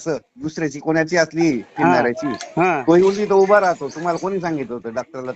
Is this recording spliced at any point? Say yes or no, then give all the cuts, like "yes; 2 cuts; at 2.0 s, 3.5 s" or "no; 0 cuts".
no; 0 cuts